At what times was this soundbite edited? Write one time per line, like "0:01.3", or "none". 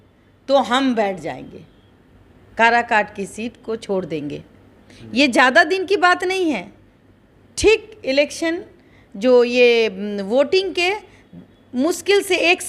none